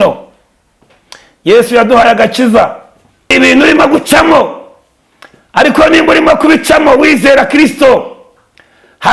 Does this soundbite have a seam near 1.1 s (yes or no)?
no